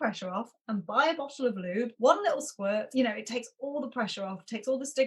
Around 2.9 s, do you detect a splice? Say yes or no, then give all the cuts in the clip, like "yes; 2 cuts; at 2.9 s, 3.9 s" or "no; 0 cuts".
yes; 2 cuts; at 1.9 s, 2.9 s